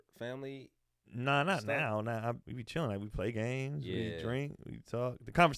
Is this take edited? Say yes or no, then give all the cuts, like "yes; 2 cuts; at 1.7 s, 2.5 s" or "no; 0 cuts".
yes; 1 cut; at 2.5 s